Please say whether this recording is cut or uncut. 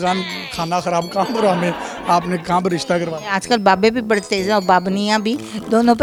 uncut